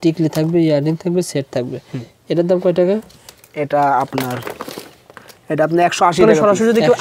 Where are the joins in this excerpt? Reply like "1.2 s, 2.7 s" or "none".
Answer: none